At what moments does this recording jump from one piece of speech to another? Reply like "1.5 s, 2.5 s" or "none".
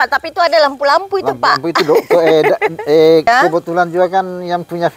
3.3 s